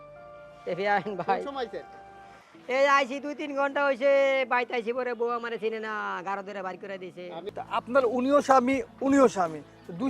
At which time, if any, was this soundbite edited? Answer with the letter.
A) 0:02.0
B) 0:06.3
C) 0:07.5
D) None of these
C